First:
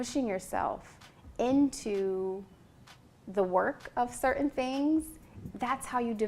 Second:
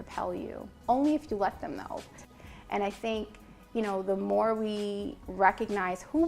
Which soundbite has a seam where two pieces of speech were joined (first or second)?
second